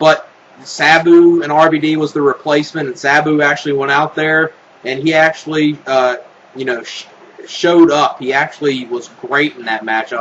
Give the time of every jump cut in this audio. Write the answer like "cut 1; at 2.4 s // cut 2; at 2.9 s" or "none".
cut 1; at 5.9 s

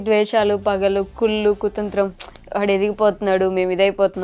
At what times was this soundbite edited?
none

